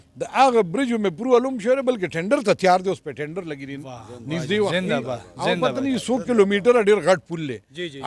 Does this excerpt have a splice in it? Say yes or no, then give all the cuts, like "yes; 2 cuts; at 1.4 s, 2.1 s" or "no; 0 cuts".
no; 0 cuts